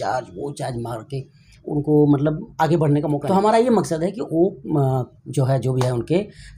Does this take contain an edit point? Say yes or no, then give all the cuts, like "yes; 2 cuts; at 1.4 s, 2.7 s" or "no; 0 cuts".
yes; 1 cut; at 3.2 s